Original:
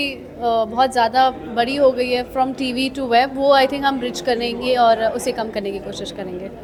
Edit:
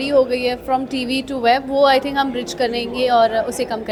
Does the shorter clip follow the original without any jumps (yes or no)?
yes